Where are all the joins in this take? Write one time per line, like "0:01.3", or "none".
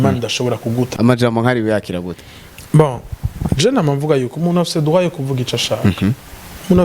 0:00.9